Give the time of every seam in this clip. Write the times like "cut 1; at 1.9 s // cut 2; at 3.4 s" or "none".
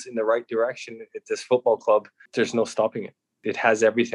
cut 1; at 2.2 s // cut 2; at 3.3 s